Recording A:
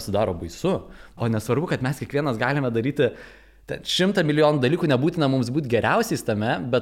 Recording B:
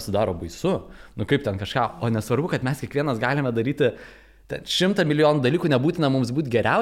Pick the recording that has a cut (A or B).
A